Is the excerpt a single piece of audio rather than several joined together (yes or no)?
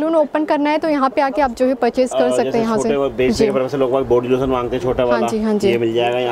yes